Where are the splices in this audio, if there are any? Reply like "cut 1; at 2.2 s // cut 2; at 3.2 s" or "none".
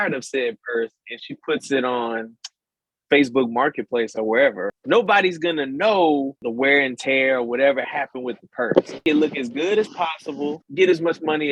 cut 1; at 4.7 s // cut 2; at 6.4 s // cut 3; at 9.0 s // cut 4; at 10.6 s